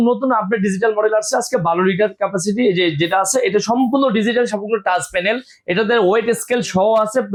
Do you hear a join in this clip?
no; 0 cuts

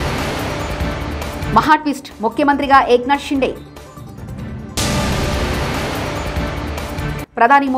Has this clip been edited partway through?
no; 0 cuts

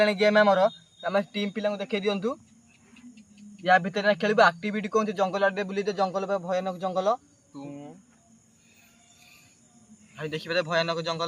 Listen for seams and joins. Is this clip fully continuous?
yes; 0 cuts

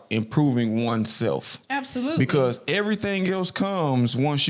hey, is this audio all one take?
yes; 0 cuts

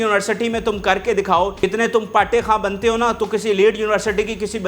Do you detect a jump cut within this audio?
yes; 1 cut; at 1.6 s

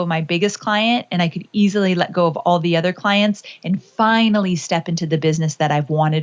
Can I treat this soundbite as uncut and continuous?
yes; 0 cuts

